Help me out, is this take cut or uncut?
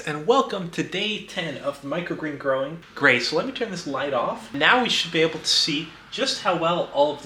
cut